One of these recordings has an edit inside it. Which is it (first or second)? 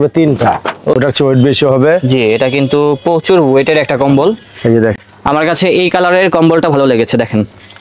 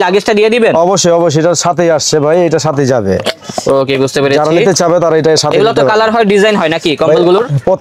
first